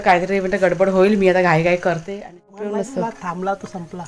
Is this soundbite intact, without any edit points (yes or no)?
no